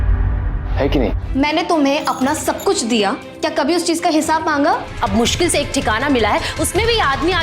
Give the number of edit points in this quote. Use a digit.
2